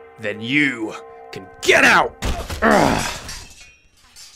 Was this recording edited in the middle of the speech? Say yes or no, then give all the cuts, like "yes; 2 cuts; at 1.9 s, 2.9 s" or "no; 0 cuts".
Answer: no; 0 cuts